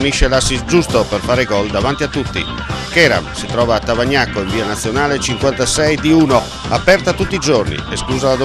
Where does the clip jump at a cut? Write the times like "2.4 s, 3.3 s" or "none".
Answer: none